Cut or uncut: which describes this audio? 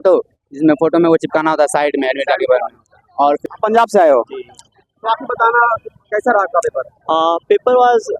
cut